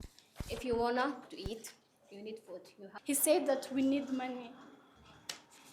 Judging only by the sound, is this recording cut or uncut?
cut